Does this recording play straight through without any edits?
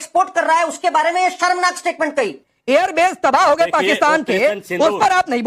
no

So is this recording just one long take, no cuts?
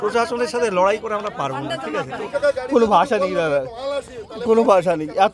no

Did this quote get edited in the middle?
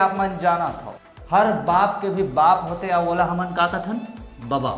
no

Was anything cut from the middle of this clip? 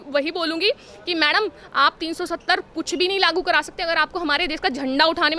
no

